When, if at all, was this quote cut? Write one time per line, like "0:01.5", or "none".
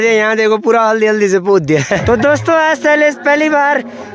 0:02.0

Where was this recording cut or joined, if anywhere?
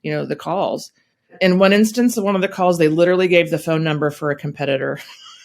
none

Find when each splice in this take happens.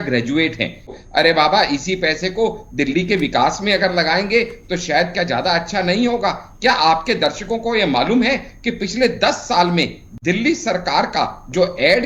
0:00.9

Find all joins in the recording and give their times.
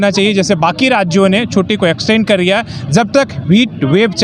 none

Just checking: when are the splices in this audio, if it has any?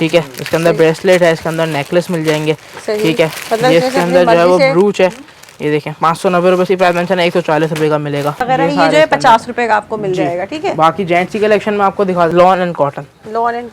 0:08.4
0:12.3

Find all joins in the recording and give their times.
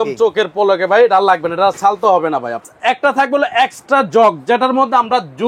0:02.7

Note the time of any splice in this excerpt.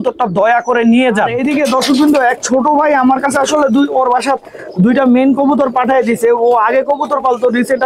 0:01.4

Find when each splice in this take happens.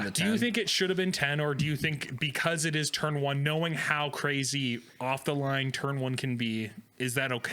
none

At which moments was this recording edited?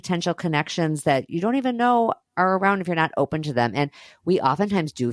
none

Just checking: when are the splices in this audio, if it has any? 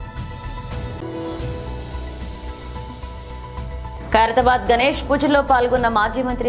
0:01.0
0:02.7

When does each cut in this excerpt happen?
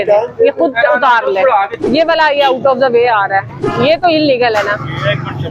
0:01.7
0:03.6

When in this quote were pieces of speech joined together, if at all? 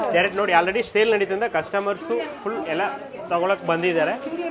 none

